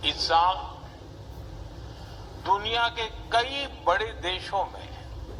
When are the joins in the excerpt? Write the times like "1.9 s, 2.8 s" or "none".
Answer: none